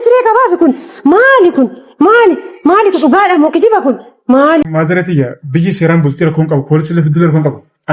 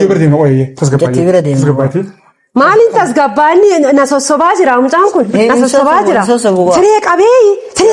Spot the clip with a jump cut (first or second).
first